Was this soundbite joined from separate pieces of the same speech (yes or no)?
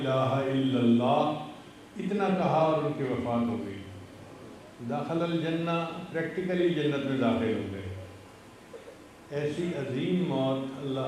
no